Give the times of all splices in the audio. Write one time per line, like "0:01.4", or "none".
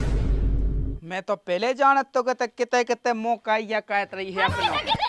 0:01.0